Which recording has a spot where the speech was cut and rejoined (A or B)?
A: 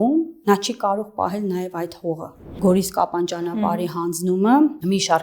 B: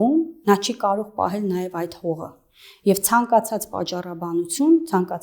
A